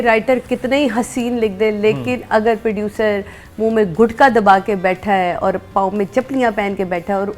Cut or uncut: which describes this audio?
uncut